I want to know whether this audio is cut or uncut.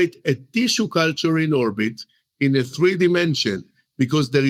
uncut